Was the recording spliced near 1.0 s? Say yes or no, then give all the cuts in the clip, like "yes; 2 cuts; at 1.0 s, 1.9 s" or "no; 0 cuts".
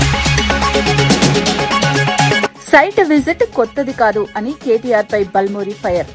no; 1 cut; at 2.5 s